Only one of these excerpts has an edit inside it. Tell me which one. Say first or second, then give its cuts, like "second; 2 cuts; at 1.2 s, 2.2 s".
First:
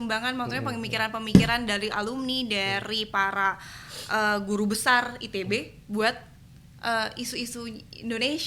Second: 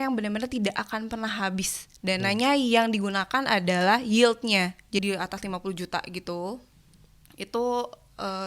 second; 1 cut; at 5.0 s